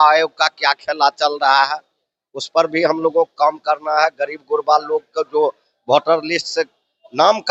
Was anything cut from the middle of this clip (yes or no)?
no